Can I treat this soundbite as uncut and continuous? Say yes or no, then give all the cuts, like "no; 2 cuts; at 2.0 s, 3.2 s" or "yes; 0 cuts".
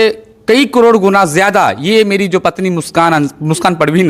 yes; 0 cuts